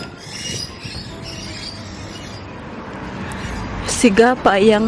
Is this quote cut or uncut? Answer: uncut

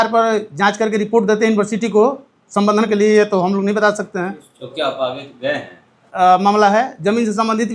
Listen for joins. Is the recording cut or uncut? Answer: cut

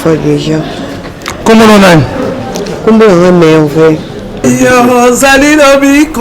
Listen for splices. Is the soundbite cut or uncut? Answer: cut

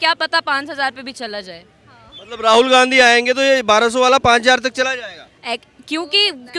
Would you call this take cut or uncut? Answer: uncut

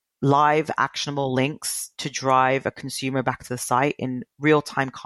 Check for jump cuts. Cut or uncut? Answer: uncut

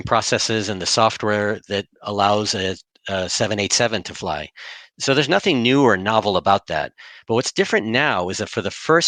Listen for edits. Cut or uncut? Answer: uncut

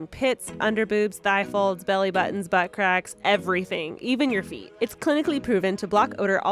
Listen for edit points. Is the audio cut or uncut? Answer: cut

